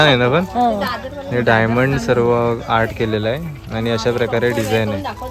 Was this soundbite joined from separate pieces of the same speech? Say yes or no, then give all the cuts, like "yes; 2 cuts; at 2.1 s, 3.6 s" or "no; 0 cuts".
no; 0 cuts